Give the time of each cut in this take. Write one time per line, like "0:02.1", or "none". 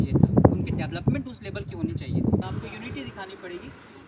0:02.5